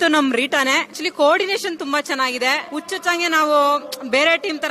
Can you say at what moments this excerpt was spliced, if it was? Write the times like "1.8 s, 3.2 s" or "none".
1.0 s, 2.6 s